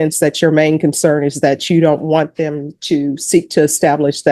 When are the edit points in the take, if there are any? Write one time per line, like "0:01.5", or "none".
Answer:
none